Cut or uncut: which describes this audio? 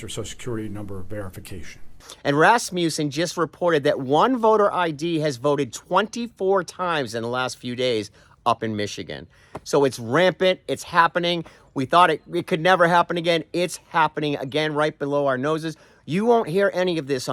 uncut